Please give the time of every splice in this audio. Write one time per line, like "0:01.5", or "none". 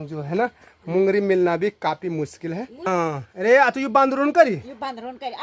0:02.8